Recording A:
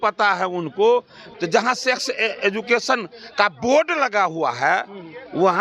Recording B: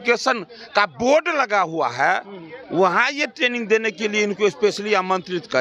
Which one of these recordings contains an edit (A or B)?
A